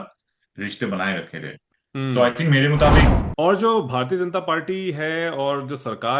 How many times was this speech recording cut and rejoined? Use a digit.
1